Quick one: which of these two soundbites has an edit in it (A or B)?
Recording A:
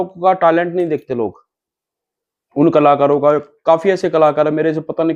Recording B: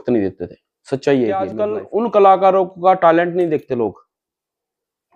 B